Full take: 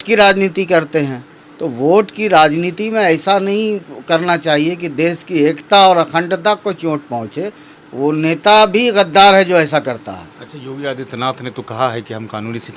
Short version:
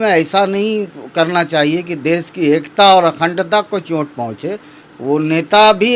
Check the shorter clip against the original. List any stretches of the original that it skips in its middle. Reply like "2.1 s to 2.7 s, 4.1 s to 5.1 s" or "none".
none